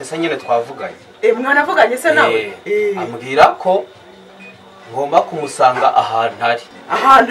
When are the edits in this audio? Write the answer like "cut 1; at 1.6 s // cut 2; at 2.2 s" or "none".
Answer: none